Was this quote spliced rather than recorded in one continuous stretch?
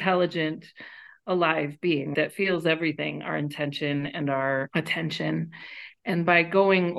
yes; 1 cut; at 4.7 s

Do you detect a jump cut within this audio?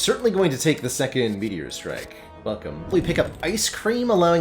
yes; 1 cut; at 2.9 s

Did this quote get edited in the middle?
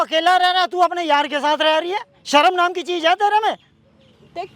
no; 0 cuts

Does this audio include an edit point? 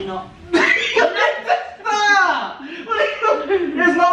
no; 0 cuts

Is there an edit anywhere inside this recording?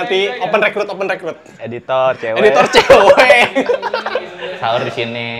yes; 1 cut; at 4.4 s

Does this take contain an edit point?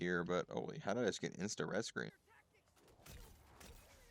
yes; 1 cut; at 2.2 s

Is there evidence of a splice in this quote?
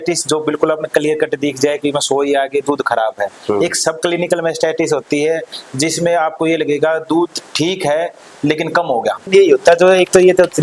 yes; 1 cut; at 9.3 s

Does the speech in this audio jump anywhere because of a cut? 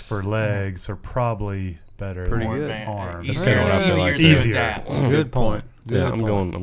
no; 0 cuts

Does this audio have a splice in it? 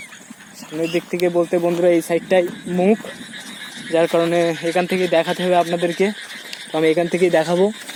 no; 0 cuts

